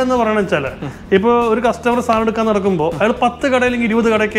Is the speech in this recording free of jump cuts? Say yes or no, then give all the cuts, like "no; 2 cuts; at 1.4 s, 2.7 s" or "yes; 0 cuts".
yes; 0 cuts